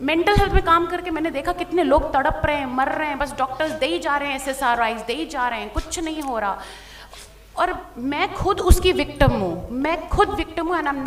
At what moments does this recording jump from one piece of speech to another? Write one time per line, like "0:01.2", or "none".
none